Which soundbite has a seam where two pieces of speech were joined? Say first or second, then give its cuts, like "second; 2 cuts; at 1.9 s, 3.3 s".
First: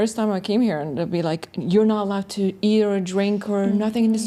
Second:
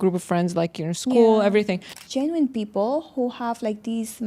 second; 1 cut; at 2.0 s